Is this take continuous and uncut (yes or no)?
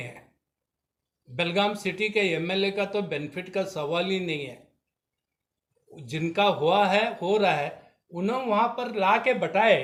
yes